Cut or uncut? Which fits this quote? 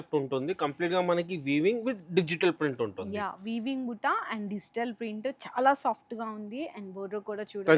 uncut